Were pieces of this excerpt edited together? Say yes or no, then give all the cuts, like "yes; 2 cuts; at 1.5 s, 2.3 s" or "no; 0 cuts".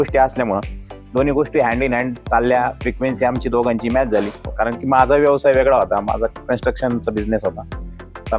yes; 1 cut; at 4.4 s